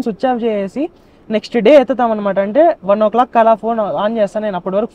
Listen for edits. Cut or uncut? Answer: uncut